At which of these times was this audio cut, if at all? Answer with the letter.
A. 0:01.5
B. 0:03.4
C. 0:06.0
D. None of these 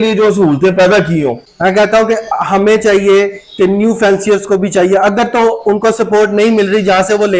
A